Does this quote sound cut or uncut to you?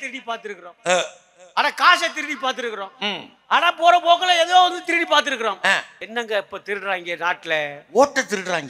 cut